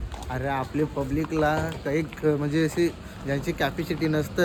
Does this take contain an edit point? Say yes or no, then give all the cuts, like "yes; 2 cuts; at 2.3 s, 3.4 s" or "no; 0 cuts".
no; 0 cuts